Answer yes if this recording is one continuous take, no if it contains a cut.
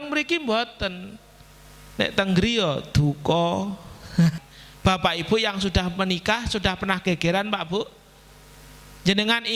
no